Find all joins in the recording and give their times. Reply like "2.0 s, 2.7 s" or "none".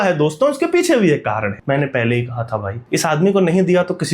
1.5 s, 2.8 s

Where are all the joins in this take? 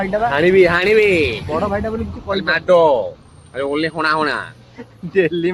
none

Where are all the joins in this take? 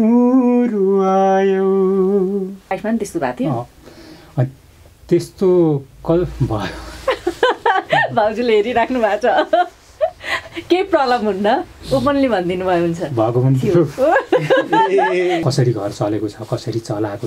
2.7 s, 15.4 s

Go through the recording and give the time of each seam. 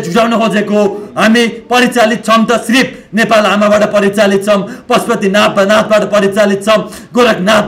none

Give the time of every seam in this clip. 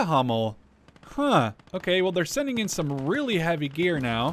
1.7 s

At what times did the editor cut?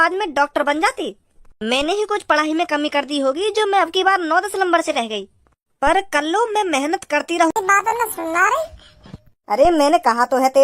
7.5 s

